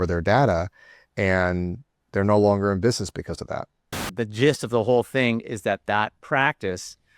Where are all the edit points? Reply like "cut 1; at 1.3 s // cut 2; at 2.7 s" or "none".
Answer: cut 1; at 4.0 s